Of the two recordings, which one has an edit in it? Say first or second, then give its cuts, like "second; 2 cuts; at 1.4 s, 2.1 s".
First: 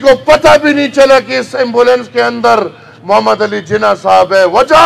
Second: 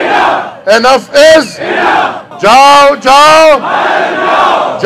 second; 1 cut; at 2.2 s